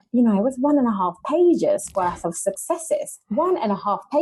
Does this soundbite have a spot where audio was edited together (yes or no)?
no